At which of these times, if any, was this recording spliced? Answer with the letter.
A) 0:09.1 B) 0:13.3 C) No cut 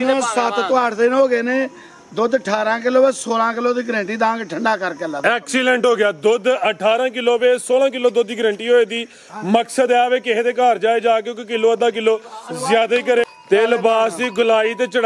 B